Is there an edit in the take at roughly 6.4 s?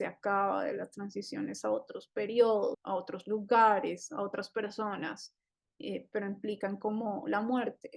no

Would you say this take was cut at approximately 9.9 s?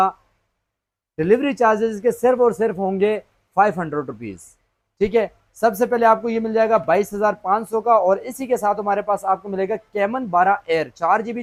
no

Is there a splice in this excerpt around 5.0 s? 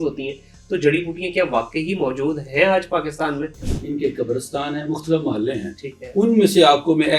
no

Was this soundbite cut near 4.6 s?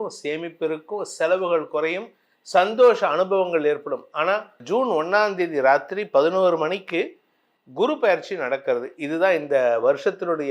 yes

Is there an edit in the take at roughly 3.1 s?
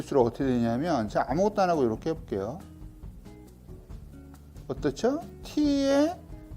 yes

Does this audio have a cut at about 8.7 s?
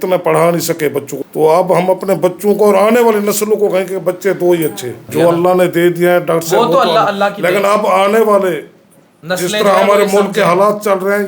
no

